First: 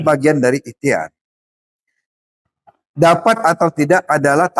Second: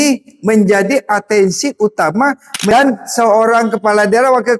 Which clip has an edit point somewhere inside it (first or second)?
second